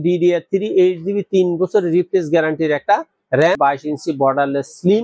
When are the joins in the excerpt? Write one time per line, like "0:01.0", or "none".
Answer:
0:03.6